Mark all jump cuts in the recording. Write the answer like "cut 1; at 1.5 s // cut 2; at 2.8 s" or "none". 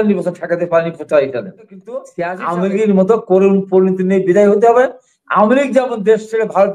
cut 1; at 2.1 s